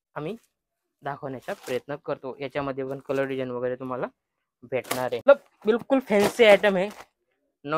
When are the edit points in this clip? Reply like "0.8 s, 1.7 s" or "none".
5.2 s